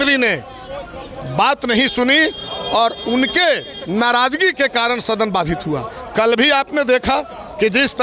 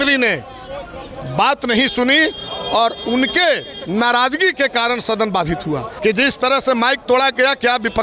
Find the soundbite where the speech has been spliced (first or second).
second